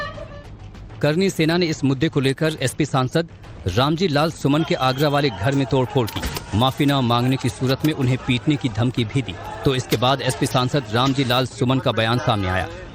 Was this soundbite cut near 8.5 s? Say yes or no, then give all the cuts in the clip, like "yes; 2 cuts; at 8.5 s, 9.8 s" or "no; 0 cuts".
yes; 1 cut; at 8.5 s